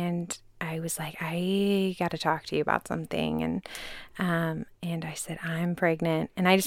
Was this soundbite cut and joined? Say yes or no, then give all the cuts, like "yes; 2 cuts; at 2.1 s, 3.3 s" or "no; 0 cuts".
no; 0 cuts